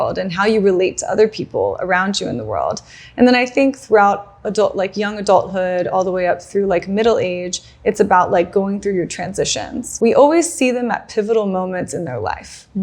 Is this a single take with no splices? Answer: no; 1 cut; at 9.8 s

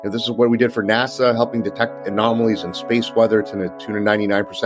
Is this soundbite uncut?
yes; 0 cuts

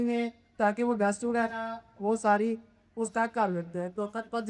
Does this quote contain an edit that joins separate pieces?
no; 0 cuts

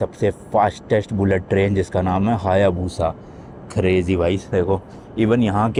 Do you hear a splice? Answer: no; 0 cuts

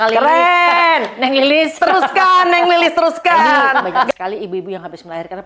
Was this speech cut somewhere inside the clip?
yes; 1 cut; at 4.1 s

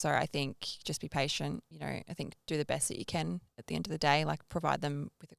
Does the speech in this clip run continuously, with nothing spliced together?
no; 1 cut; at 1.7 s

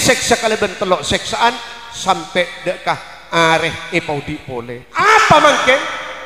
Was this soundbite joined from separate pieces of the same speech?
yes; 1 cut; at 4.8 s

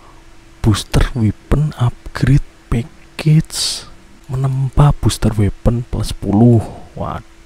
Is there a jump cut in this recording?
no; 0 cuts

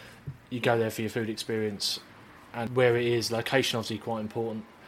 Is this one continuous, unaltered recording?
no; 1 cut; at 2.7 s

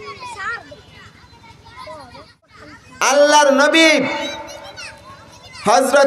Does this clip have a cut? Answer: yes; 1 cut; at 2.5 s

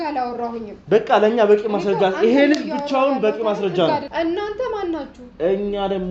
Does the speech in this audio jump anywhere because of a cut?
yes; 1 cut; at 4.1 s

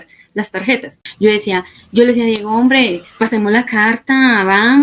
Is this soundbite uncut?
no; 1 cut; at 1.0 s

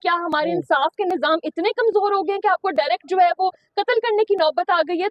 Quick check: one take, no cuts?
yes; 0 cuts

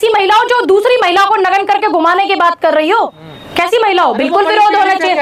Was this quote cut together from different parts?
no; 0 cuts

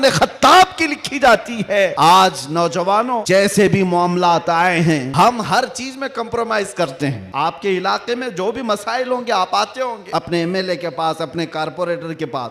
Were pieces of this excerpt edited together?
yes; 5 cuts; at 1.9 s, 3.2 s, 5.1 s, 7.2 s, 10.0 s

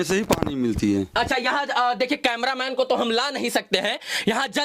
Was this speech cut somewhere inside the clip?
no; 0 cuts

